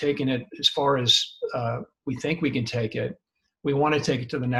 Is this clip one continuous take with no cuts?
yes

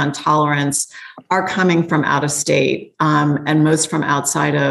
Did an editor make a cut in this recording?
no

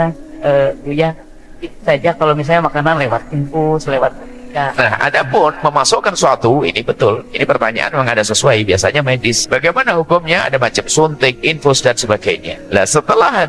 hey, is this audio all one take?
no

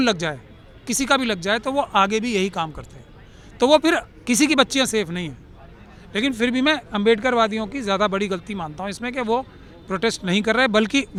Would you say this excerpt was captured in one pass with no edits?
yes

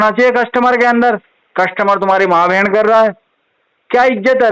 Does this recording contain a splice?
no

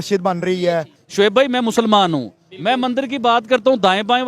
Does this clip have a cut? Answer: yes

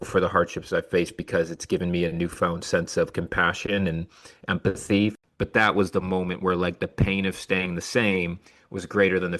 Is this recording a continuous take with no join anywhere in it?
no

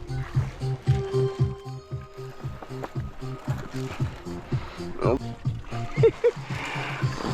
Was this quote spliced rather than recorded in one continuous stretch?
yes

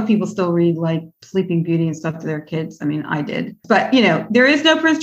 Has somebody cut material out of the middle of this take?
no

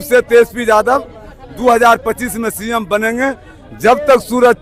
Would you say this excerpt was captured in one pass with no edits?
yes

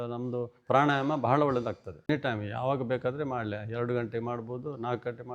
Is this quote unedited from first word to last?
no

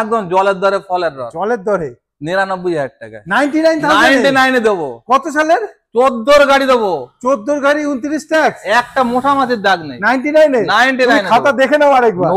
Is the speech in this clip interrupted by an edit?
no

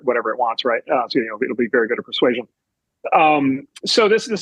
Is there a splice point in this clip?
no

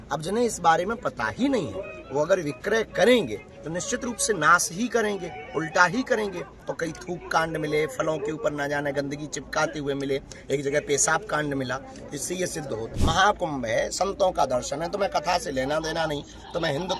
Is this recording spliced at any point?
yes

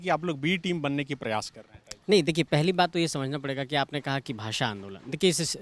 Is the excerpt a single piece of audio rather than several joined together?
yes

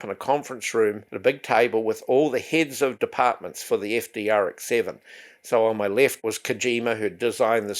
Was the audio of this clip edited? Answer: yes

